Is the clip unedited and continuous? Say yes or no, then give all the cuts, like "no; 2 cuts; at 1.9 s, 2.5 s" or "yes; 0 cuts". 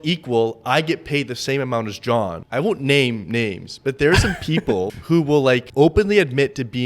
no; 3 cuts; at 2.4 s, 5.0 s, 5.7 s